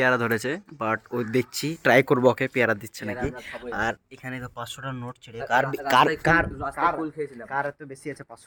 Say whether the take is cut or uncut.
uncut